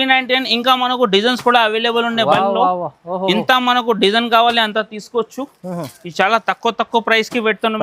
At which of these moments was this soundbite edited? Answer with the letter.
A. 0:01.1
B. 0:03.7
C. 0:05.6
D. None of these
D